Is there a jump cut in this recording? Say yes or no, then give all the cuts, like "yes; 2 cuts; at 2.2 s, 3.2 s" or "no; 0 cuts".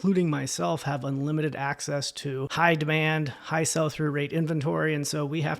no; 0 cuts